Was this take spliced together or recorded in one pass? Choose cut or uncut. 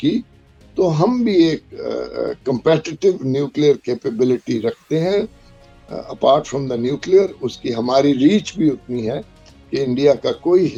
uncut